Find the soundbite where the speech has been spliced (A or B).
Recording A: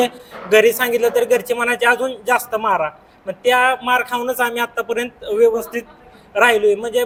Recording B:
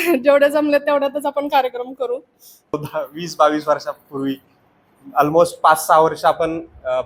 B